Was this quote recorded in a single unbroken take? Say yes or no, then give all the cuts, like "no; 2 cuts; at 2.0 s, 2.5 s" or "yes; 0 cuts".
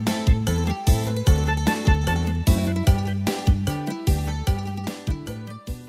yes; 0 cuts